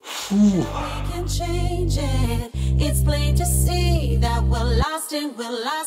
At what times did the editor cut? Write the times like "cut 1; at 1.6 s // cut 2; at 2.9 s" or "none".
cut 1; at 1.0 s